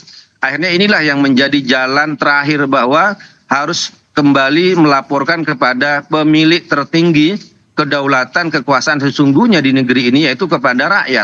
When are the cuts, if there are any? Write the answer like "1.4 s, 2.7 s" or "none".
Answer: none

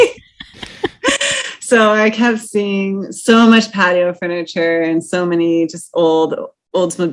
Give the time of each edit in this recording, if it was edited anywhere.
none

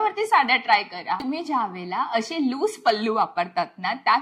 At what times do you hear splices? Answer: 1.2 s

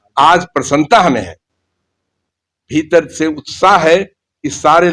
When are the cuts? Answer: none

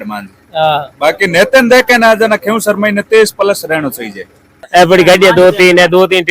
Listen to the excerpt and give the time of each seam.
4.6 s

